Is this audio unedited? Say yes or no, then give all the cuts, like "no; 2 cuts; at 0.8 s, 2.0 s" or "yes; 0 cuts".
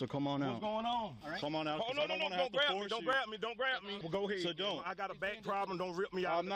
no; 2 cuts; at 1.2 s, 4.0 s